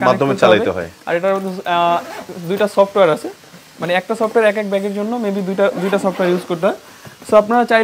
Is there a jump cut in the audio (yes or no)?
no